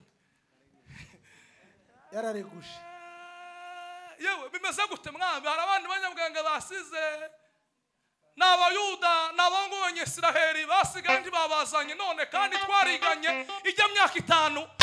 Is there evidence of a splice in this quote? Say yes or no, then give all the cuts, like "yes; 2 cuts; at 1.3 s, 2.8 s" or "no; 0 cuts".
no; 0 cuts